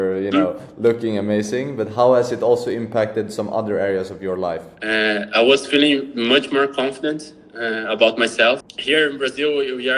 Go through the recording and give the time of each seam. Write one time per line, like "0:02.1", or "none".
0:04.7
0:08.7